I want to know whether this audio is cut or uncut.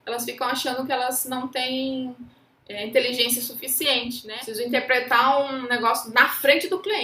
cut